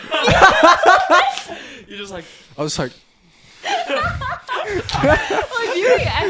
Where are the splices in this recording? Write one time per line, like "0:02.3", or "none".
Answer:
none

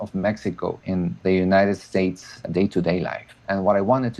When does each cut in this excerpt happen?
0:00.9
0:03.3

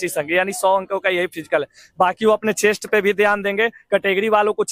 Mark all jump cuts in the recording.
none

